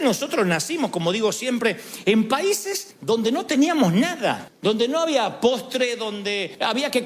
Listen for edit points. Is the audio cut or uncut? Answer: uncut